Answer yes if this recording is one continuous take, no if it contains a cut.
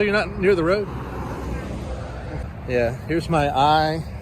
no